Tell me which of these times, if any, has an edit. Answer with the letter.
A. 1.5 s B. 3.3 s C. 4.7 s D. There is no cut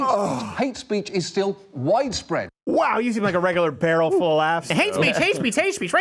C